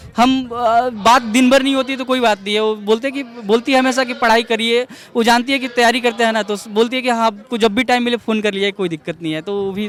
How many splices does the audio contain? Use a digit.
0